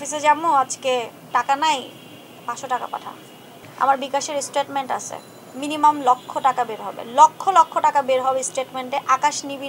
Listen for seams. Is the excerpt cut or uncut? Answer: cut